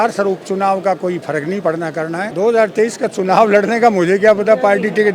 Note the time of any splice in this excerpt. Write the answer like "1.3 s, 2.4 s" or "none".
2.3 s

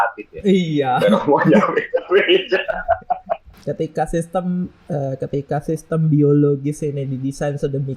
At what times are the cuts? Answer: 3.5 s

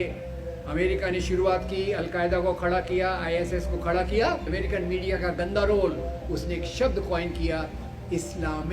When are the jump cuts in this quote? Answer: 4.5 s

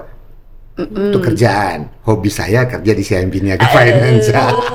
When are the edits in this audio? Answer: none

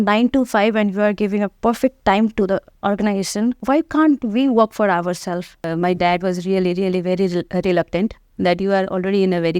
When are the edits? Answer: 3.6 s, 5.7 s

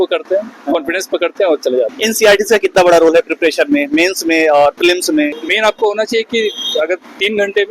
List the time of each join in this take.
1.9 s, 5.5 s

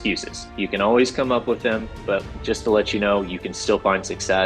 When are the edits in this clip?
2.3 s

